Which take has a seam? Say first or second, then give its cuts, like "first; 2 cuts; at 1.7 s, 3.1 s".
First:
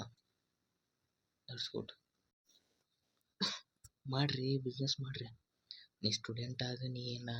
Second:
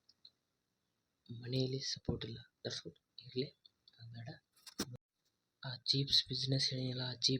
second; 1 cut; at 5.0 s